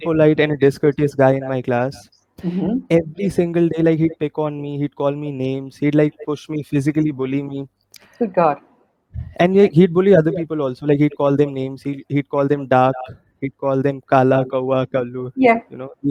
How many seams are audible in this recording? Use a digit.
0